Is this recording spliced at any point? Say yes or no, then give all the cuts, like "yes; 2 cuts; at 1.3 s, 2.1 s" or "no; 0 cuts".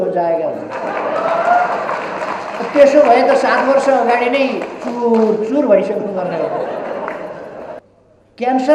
yes; 1 cut; at 7.8 s